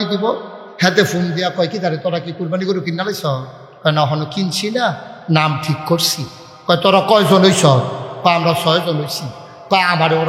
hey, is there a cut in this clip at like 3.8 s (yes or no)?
no